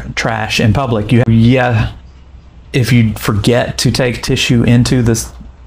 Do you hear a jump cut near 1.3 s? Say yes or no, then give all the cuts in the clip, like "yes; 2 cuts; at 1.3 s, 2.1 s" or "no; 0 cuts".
yes; 1 cut; at 1.3 s